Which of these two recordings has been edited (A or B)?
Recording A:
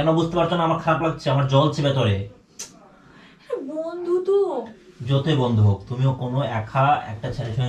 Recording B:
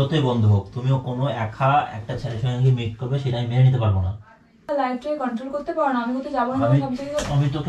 B